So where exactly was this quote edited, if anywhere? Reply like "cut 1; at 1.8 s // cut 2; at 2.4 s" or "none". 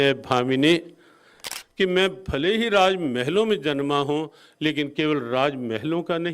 cut 1; at 1.4 s